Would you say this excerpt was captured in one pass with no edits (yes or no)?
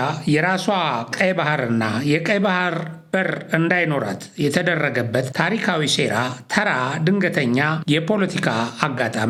yes